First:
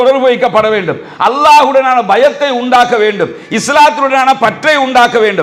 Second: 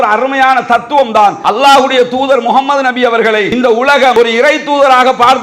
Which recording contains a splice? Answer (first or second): second